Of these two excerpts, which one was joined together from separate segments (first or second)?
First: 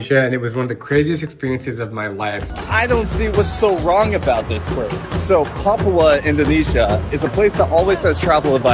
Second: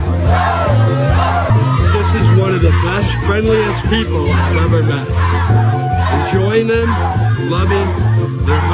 first